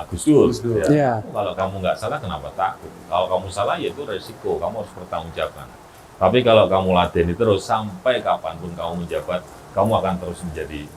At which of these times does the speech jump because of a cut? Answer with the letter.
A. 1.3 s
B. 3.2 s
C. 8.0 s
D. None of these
A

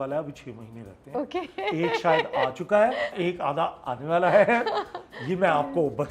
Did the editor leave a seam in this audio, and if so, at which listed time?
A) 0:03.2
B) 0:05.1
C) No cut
A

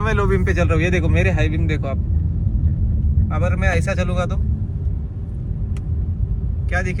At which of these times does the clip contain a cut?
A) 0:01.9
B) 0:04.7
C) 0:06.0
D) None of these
D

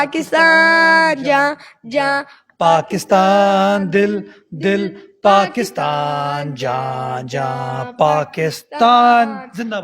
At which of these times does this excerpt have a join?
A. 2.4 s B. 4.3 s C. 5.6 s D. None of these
D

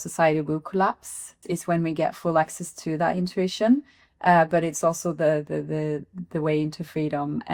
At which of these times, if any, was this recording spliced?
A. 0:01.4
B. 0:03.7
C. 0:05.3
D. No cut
A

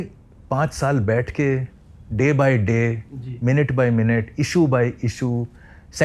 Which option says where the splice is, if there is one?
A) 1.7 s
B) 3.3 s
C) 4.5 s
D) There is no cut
D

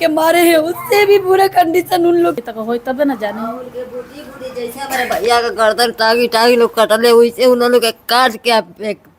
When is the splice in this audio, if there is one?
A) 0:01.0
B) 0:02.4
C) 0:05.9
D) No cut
B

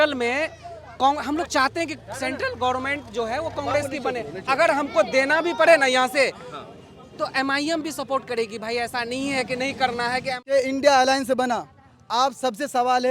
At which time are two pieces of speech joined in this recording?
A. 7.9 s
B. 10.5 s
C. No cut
B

